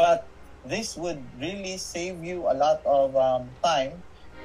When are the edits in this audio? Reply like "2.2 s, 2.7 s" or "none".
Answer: none